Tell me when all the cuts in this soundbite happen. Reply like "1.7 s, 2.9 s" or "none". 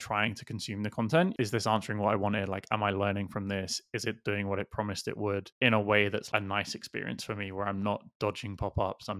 1.3 s, 6.3 s